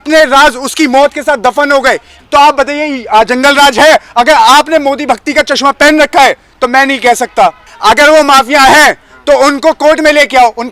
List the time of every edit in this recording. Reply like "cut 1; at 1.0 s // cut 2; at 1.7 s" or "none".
cut 1; at 2.1 s // cut 2; at 7.7 s